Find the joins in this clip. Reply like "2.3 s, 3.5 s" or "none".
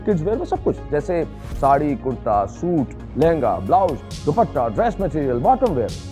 none